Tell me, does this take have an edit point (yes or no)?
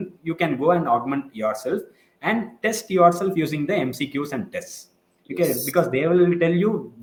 no